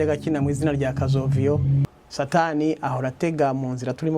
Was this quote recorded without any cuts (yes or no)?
no